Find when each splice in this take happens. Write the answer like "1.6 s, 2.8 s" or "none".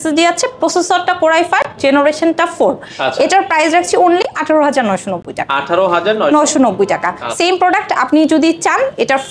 none